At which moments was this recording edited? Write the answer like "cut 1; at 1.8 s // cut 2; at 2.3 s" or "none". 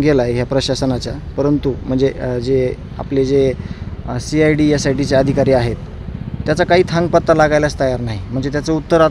none